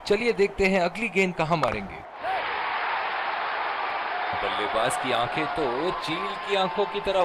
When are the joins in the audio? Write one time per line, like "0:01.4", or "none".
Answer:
0:02.3
0:04.3